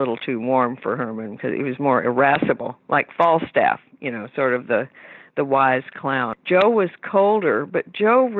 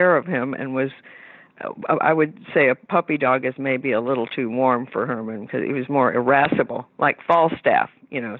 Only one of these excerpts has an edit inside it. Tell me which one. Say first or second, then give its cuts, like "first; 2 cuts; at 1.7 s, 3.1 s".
first; 1 cut; at 6.4 s